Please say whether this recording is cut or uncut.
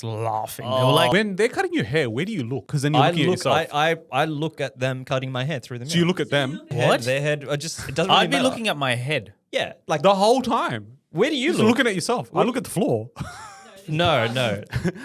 cut